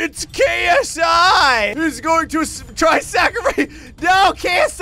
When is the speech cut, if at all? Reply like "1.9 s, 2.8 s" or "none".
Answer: 1.7 s